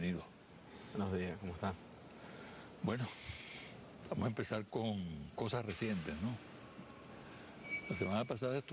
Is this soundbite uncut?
yes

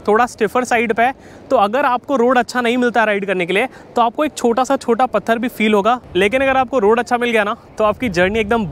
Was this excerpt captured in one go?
yes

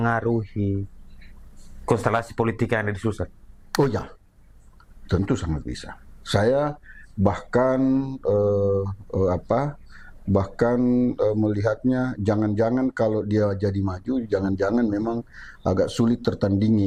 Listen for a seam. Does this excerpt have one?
no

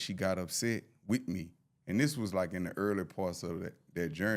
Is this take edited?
no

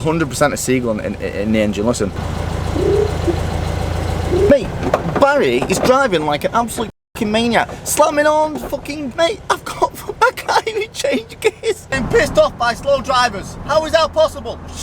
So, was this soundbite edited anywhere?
yes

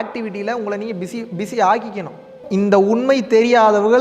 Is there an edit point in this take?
yes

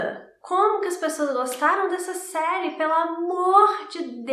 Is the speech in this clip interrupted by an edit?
no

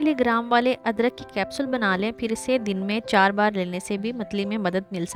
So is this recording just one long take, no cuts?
yes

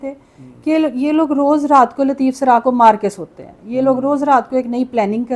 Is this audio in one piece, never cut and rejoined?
yes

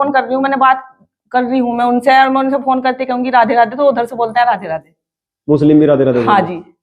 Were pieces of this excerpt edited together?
no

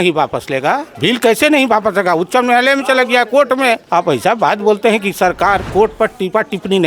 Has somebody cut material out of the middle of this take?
yes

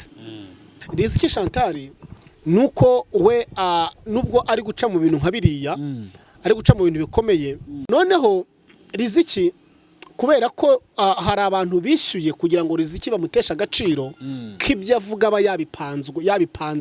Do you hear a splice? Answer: yes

